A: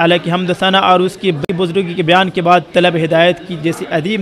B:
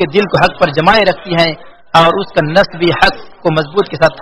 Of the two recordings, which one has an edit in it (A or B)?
A